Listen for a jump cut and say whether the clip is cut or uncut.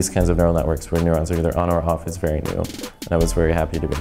uncut